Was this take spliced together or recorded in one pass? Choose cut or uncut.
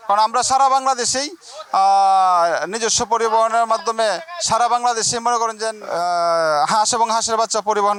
uncut